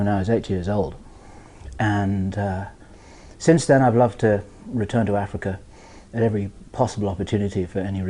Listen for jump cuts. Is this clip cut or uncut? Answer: uncut